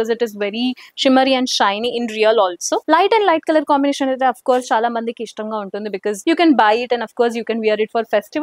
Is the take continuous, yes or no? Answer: no